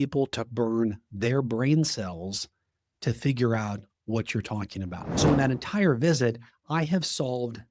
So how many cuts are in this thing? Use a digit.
1